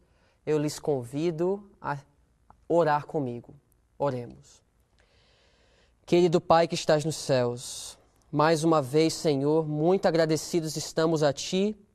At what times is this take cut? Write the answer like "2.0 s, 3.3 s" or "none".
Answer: 5.7 s